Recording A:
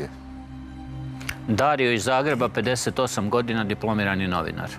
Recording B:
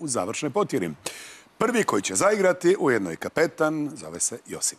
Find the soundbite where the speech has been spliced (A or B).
B